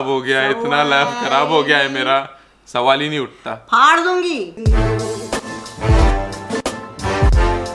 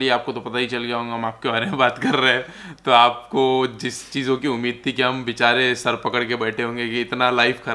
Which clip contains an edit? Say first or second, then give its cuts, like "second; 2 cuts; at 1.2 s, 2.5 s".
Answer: first; 1 cut; at 4.6 s